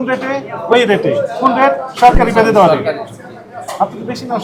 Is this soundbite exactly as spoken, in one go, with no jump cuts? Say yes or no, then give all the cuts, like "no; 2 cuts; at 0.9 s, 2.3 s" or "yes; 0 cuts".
yes; 0 cuts